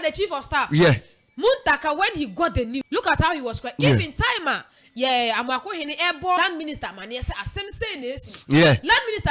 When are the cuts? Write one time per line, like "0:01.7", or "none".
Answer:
0:02.8
0:06.4